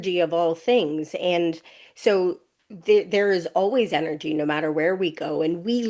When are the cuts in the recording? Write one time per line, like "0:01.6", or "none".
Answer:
none